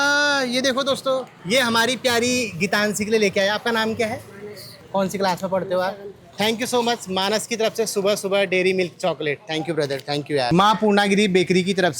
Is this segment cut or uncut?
uncut